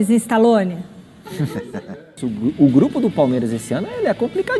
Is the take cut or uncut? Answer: cut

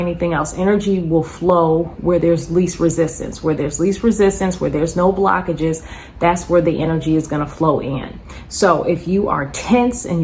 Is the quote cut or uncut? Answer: uncut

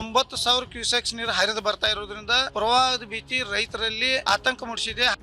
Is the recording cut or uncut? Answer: cut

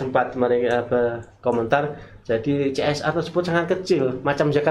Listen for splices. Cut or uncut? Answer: uncut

